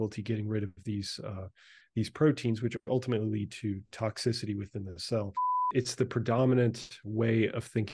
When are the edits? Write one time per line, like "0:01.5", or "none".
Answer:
0:05.6